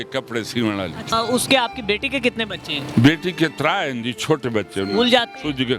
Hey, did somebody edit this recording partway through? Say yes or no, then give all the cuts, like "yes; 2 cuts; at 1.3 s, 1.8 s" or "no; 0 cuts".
yes; 1 cut; at 1.0 s